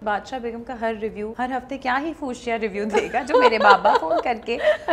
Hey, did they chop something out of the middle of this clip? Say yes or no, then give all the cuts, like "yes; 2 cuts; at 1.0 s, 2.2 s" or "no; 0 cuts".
yes; 1 cut; at 1.3 s